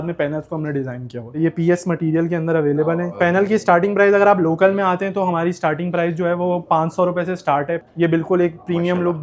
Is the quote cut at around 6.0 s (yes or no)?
no